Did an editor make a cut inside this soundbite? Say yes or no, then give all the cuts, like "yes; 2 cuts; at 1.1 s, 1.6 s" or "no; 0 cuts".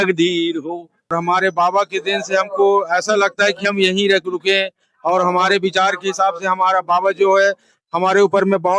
yes; 1 cut; at 1.2 s